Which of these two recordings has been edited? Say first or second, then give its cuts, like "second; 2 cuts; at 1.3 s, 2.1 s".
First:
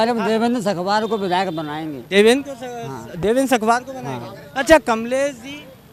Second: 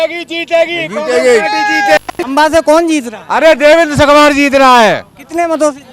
second; 1 cut; at 2.2 s